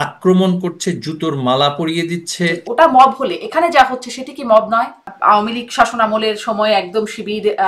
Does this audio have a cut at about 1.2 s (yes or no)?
no